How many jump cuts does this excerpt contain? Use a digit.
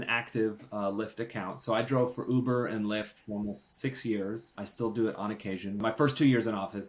2